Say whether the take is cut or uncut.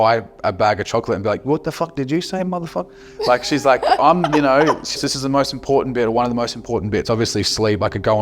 cut